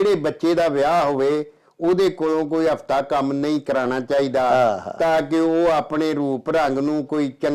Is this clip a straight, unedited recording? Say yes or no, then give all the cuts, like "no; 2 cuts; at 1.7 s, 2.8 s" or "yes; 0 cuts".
yes; 0 cuts